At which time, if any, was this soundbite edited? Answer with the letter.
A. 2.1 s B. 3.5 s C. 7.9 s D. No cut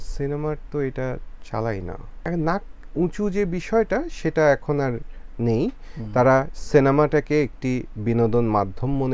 A